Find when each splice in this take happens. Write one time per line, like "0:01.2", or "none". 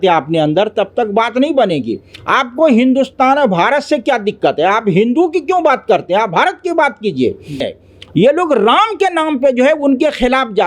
0:07.7